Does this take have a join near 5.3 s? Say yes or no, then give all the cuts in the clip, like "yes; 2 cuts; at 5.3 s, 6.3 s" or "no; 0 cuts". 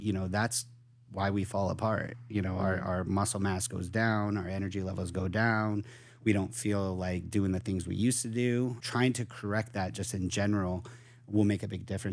no; 1 cut; at 8.8 s